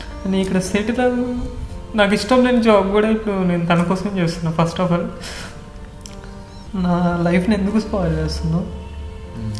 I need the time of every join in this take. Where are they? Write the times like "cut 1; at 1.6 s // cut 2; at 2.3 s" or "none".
cut 1; at 6.6 s